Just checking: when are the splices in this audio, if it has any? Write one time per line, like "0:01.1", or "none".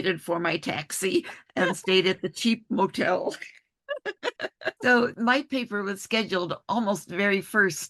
none